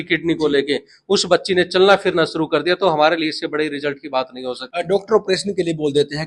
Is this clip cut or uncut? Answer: uncut